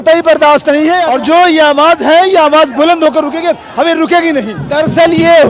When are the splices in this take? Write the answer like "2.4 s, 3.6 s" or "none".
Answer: 1.1 s, 4.6 s